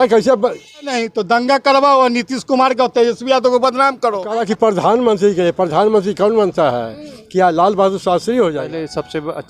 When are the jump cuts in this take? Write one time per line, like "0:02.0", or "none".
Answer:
0:00.9
0:04.3
0:08.7